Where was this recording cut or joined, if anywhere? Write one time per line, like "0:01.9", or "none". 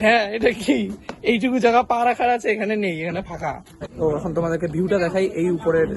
0:03.9